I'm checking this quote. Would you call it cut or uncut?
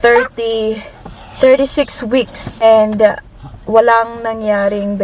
cut